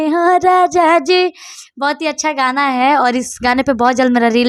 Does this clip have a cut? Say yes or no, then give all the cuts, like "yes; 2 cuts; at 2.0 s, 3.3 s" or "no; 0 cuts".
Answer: no; 0 cuts